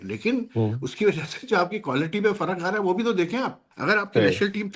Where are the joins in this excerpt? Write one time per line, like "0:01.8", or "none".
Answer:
0:03.6